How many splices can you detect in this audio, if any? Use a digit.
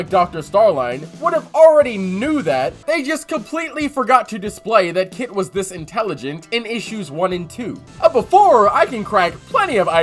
2